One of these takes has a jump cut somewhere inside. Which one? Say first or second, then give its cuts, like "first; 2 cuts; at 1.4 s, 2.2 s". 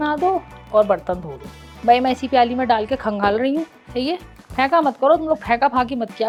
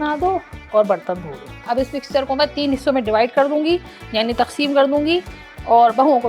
second; 1 cut; at 1.5 s